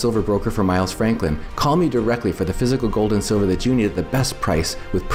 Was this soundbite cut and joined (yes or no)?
no